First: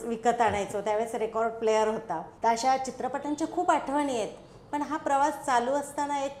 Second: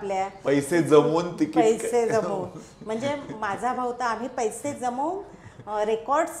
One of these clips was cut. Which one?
first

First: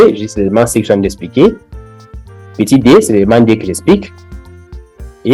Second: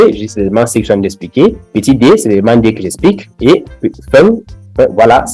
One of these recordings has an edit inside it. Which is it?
second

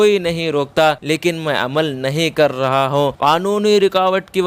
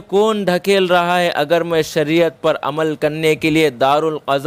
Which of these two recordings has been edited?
first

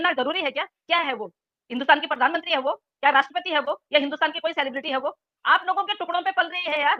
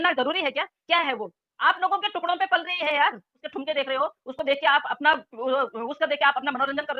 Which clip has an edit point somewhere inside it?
second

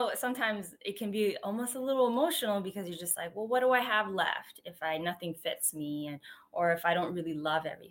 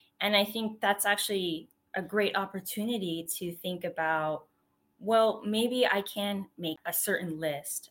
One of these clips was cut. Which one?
second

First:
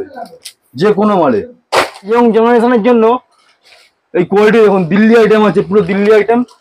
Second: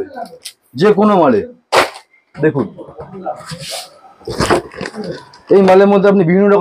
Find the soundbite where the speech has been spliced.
first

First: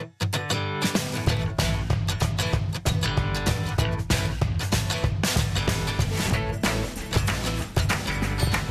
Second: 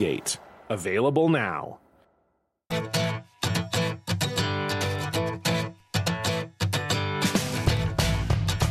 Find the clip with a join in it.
second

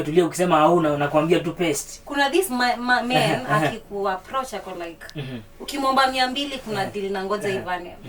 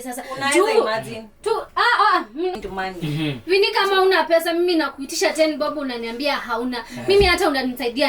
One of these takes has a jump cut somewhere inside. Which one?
second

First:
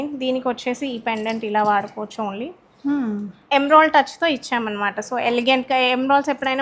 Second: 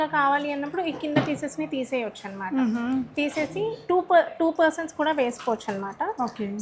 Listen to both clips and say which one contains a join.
first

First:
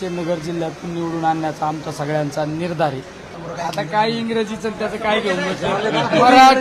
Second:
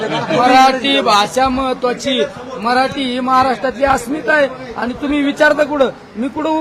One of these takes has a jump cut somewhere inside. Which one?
first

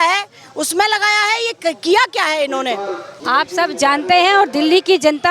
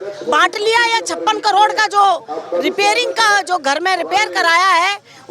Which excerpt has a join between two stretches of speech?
first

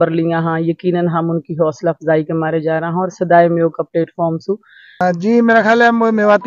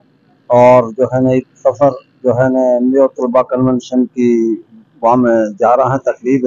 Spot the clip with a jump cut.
first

